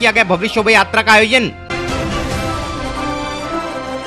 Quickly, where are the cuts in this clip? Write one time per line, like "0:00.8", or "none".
0:01.6